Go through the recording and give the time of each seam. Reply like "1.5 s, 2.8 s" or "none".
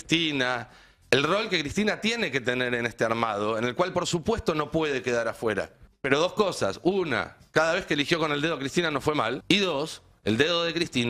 5.8 s, 9.4 s